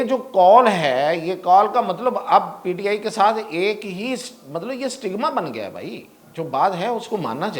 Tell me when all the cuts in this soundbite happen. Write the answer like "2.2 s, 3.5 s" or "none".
none